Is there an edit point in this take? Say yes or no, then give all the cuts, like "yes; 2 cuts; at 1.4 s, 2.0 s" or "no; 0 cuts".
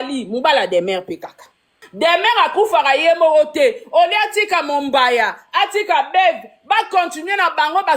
yes; 1 cut; at 1.8 s